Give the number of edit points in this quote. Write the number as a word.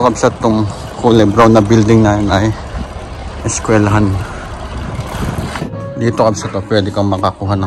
one